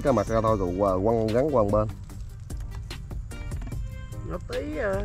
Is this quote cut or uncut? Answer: uncut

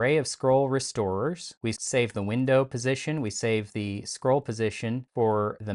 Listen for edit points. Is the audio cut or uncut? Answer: uncut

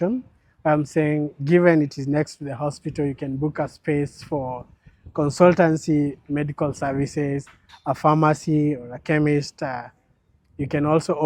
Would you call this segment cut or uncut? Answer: uncut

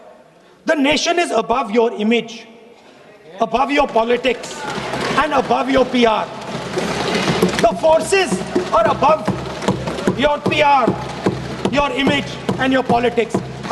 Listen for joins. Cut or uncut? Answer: uncut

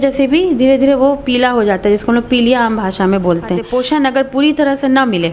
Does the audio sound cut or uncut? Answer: cut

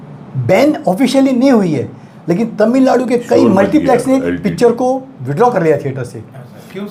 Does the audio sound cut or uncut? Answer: uncut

